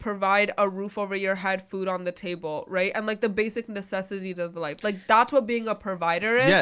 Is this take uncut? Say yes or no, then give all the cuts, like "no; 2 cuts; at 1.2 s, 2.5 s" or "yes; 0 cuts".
yes; 0 cuts